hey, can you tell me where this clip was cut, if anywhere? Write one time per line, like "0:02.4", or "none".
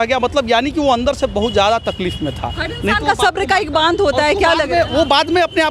none